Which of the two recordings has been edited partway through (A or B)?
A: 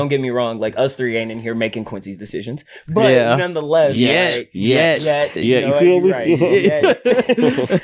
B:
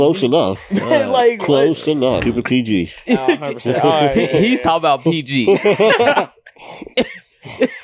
B